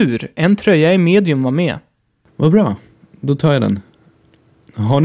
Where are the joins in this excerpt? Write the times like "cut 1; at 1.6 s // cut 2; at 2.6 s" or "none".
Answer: cut 1; at 1.9 s